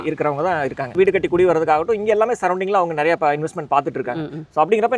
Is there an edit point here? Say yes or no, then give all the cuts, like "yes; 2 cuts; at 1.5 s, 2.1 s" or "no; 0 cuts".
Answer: yes; 1 cut; at 0.9 s